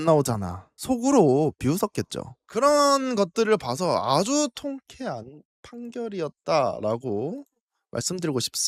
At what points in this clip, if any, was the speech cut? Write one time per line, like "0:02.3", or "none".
none